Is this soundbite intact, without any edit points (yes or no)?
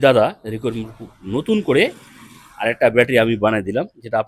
yes